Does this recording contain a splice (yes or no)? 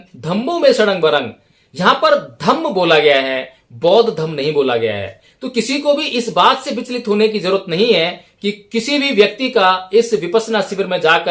no